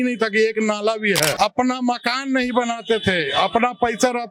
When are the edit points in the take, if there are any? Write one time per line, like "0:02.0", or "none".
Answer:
0:01.3